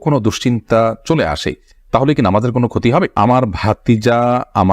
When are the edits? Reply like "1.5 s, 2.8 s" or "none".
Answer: 3.1 s